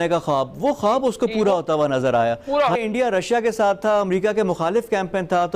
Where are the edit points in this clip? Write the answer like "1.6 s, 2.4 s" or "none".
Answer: 2.8 s